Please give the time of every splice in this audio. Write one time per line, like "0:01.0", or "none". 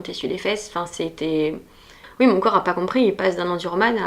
0:02.0